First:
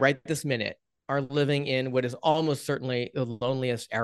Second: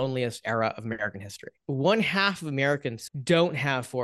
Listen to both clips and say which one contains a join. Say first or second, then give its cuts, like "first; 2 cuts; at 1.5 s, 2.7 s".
second; 2 cuts; at 1.5 s, 3.0 s